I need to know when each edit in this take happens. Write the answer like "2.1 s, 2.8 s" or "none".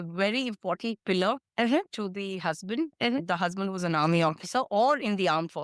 none